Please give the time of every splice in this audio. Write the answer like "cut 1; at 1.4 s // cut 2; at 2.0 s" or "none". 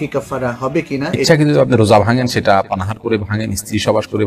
cut 1; at 1.3 s